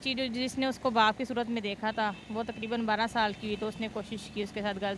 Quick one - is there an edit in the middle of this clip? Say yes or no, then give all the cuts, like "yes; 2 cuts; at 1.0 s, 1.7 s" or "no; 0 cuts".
no; 0 cuts